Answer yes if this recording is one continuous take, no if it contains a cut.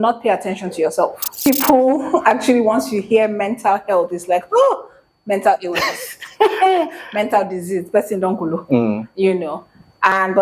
no